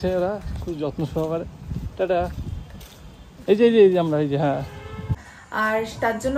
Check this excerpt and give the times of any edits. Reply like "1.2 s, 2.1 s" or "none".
5.1 s